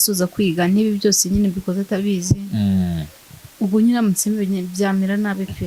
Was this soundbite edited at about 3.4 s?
no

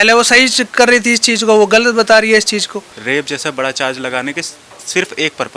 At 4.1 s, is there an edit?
no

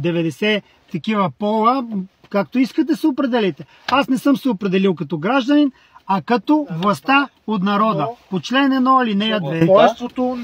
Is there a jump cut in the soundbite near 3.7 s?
no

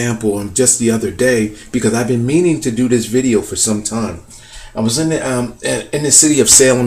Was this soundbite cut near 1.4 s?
no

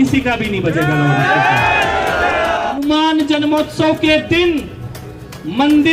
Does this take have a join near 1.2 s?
no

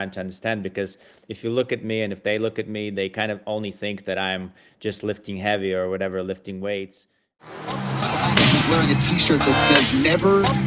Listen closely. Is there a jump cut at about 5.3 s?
no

